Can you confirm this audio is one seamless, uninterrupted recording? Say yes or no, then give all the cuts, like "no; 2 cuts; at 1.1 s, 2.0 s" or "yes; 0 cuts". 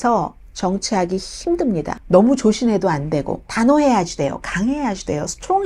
no; 2 cuts; at 1.9 s, 3.4 s